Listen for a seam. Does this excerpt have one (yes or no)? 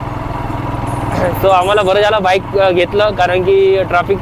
no